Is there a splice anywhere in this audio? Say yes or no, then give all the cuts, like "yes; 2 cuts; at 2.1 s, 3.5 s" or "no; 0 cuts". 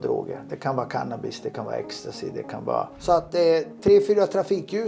yes; 1 cut; at 2.9 s